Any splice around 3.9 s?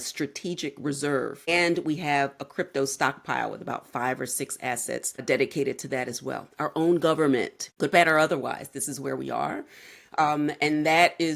no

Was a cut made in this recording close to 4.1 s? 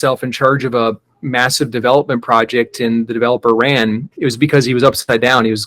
yes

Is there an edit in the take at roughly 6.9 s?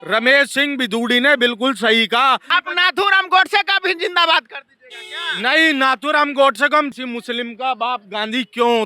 yes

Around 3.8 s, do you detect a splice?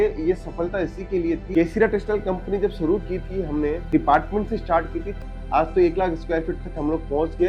yes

